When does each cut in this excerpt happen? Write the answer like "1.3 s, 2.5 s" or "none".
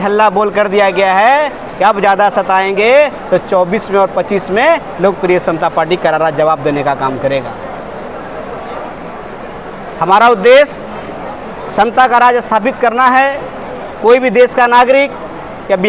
none